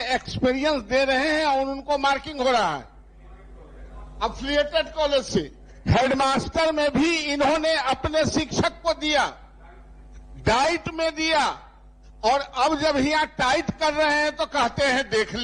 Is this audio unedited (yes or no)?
yes